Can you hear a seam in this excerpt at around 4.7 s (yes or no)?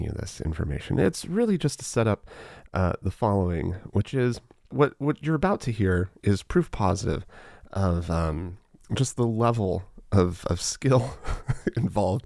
yes